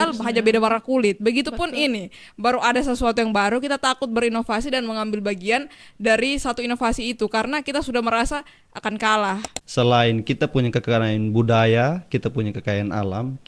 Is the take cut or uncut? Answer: cut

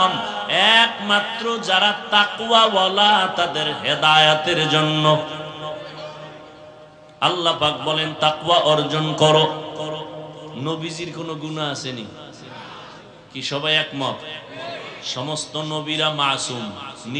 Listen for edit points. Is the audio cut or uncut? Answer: cut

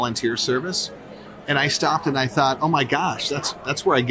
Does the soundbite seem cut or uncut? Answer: uncut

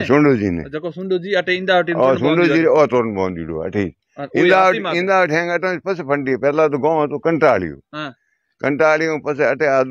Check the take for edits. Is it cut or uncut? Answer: uncut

